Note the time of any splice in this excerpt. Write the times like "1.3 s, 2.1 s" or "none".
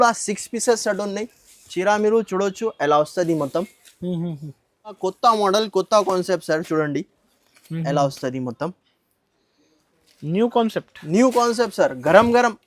5.0 s